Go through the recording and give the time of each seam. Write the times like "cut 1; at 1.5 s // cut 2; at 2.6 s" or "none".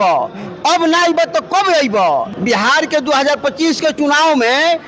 cut 1; at 2.3 s